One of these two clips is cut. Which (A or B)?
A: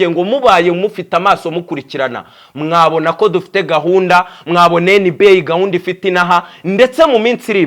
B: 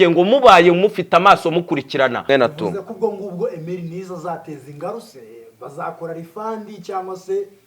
B